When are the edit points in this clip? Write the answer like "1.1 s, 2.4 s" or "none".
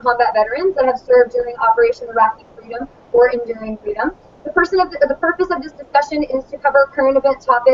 none